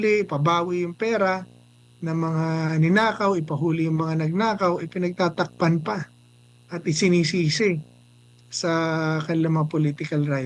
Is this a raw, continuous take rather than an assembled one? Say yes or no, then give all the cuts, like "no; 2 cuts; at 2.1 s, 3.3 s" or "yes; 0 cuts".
yes; 0 cuts